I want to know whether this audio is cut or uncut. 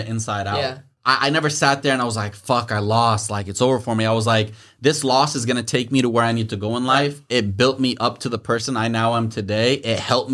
cut